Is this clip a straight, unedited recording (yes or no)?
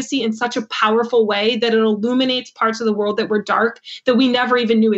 yes